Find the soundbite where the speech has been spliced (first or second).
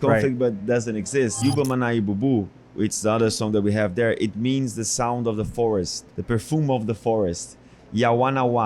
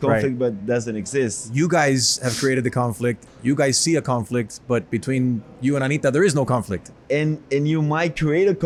first